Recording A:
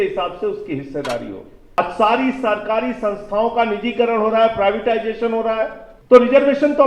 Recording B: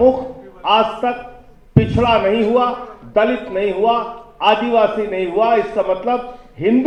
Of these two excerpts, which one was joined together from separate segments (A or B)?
A